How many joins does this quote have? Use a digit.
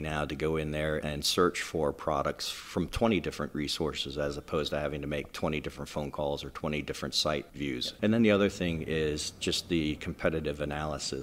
2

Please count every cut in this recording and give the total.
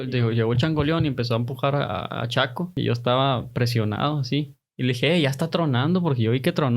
1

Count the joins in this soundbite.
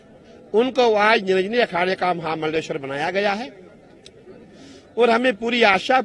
0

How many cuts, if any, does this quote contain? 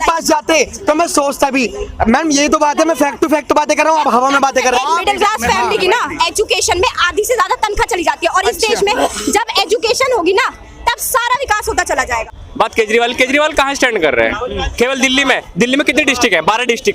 2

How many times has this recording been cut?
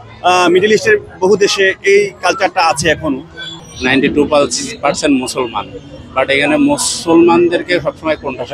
1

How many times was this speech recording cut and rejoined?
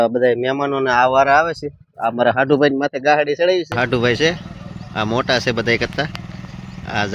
1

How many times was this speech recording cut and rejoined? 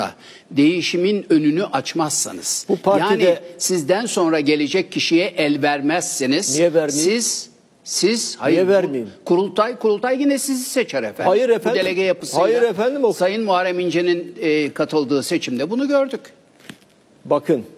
0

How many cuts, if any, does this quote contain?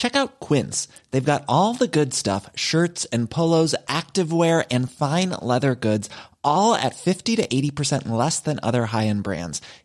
0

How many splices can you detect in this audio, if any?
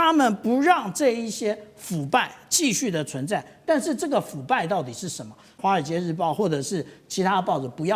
1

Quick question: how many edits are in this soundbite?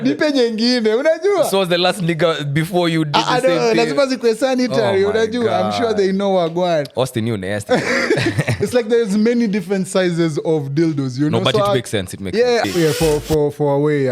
1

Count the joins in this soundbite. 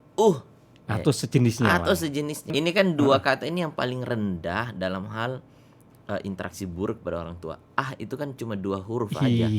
1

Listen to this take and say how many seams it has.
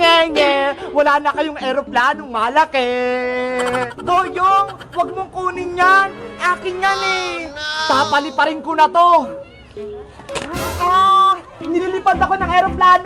2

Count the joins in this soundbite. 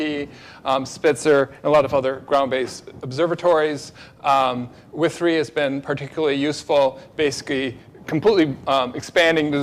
1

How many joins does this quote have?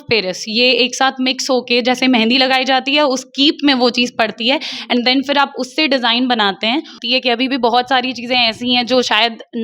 1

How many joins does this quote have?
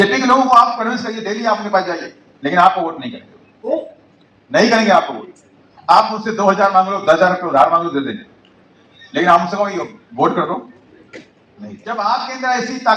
0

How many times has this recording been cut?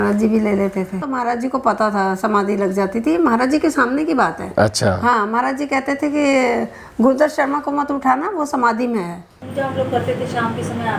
2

